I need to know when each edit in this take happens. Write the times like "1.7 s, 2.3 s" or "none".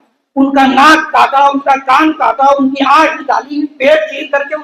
none